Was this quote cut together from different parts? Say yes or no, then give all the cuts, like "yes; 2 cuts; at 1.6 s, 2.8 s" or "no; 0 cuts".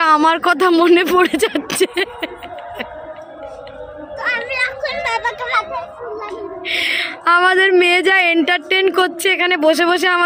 no; 0 cuts